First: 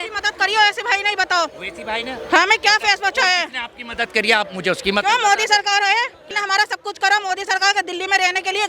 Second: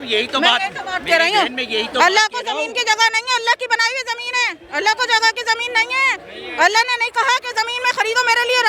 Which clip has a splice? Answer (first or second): first